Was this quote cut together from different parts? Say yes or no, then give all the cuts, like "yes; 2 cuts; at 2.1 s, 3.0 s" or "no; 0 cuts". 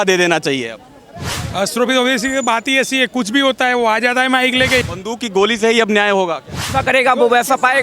yes; 2 cuts; at 4.8 s, 6.7 s